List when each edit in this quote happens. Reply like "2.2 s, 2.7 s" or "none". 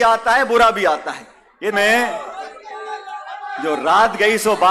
1.7 s

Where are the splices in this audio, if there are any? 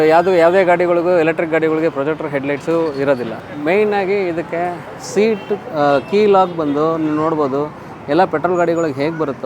3.4 s

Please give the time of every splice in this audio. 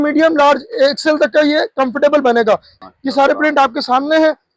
2.8 s

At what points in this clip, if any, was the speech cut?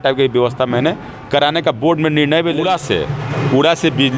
2.6 s

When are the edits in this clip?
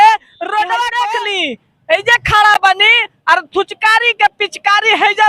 1.1 s

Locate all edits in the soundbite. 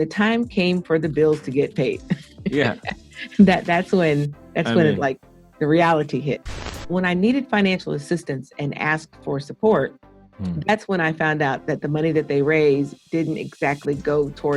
6.9 s

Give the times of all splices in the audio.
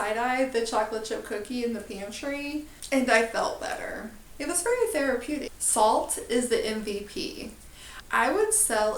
4.2 s, 5.6 s, 8.1 s

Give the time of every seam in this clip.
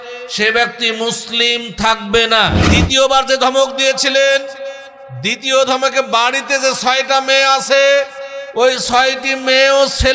2.6 s

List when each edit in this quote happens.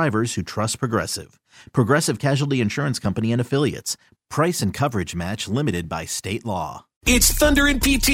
7.0 s

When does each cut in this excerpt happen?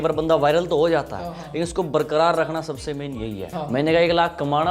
3.5 s

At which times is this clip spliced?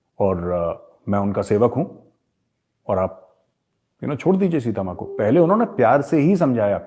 none

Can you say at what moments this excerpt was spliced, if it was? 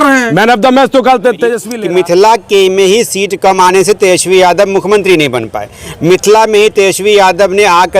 1.6 s

